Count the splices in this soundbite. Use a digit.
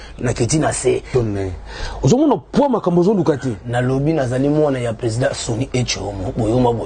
1